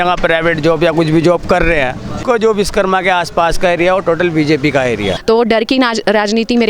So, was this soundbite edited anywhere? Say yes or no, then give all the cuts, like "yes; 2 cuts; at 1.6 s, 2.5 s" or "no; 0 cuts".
yes; 2 cuts; at 2.2 s, 5.1 s